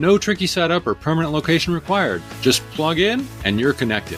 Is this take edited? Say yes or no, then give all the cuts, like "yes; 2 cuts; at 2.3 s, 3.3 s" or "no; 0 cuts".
no; 0 cuts